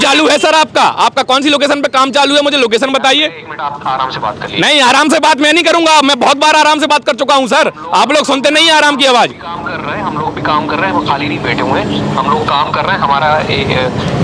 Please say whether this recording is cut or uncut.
uncut